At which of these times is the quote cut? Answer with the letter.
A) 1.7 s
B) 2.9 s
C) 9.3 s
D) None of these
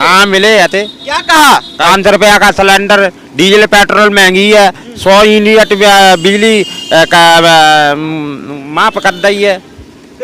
A